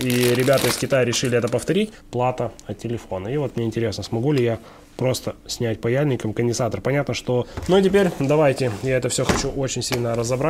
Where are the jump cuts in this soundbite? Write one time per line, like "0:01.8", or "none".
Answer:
0:01.9
0:07.5